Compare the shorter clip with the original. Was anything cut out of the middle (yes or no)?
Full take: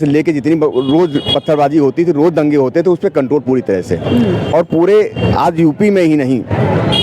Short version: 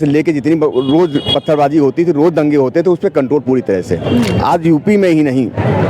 yes